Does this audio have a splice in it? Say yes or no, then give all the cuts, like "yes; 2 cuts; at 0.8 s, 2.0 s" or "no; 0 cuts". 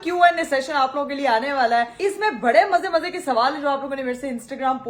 yes; 1 cut; at 1.9 s